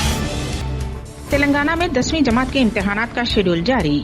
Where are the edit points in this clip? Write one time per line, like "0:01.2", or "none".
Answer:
0:01.1